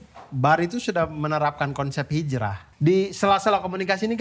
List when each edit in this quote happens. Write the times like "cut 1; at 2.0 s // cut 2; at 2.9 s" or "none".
cut 1; at 2.6 s